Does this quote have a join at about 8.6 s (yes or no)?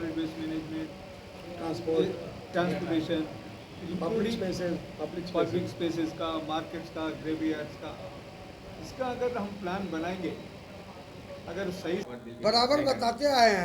no